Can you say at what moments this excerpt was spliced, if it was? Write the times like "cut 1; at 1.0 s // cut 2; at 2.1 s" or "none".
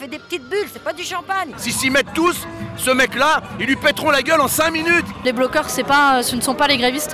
cut 1; at 1.6 s // cut 2; at 5.2 s